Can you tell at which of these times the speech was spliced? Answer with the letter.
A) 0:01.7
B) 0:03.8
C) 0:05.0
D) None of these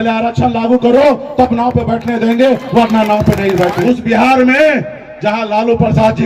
B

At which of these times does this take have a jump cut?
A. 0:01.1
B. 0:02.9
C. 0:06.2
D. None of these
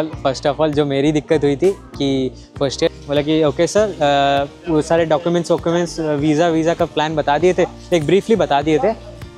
B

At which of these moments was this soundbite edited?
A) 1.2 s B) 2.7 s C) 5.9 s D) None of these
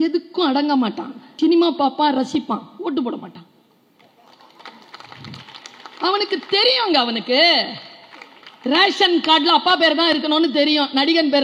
A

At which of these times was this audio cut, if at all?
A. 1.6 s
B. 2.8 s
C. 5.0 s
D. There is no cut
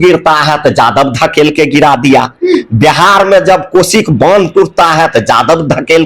D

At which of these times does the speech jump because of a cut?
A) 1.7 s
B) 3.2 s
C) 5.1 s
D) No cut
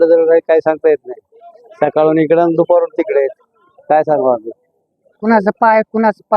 C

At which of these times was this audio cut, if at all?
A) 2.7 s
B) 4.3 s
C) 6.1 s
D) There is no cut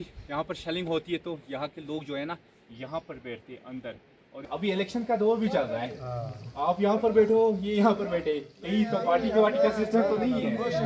B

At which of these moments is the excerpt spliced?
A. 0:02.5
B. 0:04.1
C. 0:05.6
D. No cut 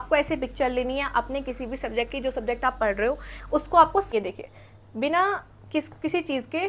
B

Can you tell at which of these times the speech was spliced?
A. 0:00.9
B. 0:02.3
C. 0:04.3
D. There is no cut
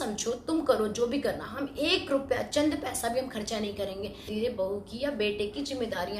C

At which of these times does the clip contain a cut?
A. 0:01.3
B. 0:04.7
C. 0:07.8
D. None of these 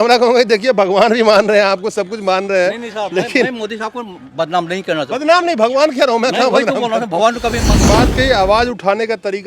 C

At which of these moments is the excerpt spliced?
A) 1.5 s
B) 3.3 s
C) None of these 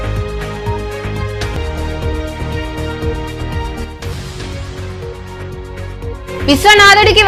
C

